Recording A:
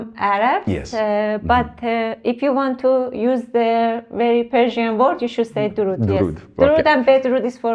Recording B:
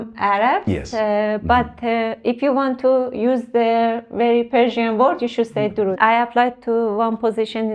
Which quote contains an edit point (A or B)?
B